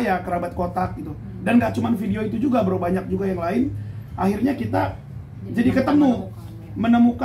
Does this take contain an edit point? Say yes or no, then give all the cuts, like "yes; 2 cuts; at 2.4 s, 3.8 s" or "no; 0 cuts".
no; 0 cuts